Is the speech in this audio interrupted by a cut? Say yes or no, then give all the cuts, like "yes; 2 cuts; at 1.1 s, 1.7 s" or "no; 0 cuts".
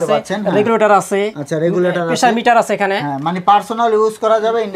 no; 0 cuts